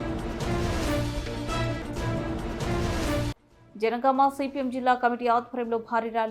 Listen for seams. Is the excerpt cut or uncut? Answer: uncut